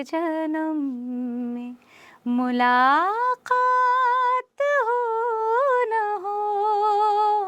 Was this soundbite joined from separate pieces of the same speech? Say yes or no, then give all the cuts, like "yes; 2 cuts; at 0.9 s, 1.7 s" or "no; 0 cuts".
no; 0 cuts